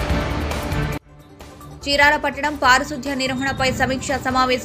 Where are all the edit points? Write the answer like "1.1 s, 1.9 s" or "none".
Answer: 1.0 s